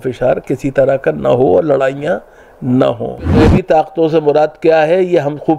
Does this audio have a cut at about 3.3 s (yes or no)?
yes